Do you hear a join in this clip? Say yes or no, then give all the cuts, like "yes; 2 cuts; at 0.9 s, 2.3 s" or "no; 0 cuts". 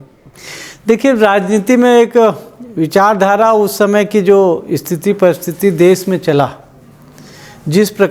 no; 0 cuts